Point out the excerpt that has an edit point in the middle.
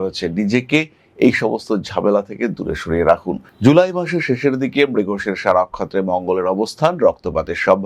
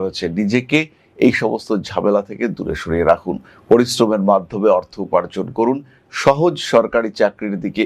first; 1 cut; at 3.4 s

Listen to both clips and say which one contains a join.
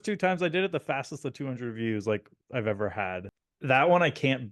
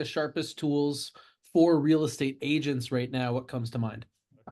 first; 1 cut; at 3.3 s

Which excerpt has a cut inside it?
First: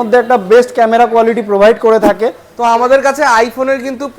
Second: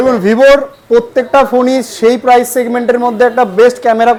first; 1 cut; at 2.4 s

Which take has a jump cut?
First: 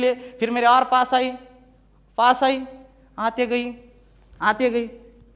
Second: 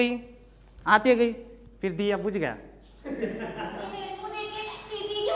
second; 1 cut; at 4.2 s

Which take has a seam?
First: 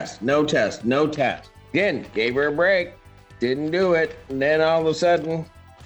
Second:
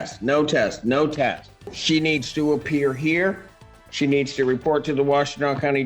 second; 1 cut; at 1.5 s

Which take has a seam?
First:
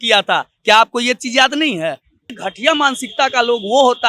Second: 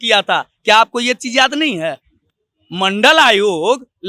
first; 1 cut; at 2.5 s

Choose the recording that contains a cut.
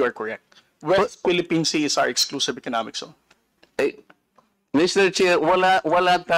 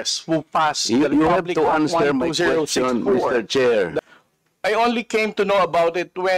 second; 1 cut; at 4.0 s

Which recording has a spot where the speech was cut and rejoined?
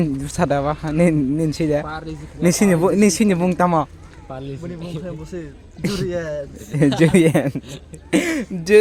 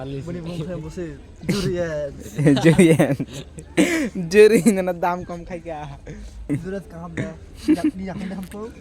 second; 1 cut; at 6.5 s

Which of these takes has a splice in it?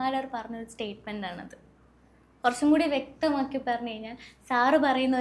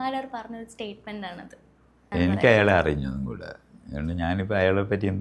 second; 1 cut; at 2.1 s

